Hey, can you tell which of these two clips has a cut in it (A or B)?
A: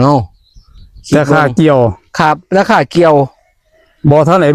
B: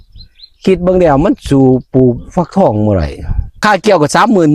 B